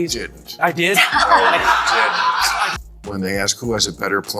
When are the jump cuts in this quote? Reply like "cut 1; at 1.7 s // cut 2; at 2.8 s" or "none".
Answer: cut 1; at 2.7 s